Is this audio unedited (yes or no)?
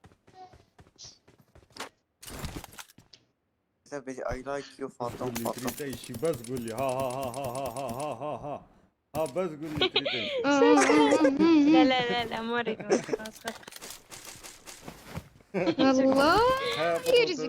no